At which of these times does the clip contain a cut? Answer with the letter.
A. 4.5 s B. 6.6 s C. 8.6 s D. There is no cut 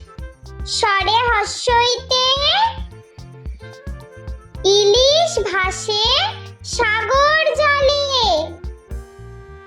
C